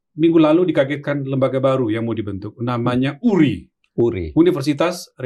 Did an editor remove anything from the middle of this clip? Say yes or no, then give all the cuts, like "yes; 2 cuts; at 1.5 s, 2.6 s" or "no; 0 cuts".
no; 0 cuts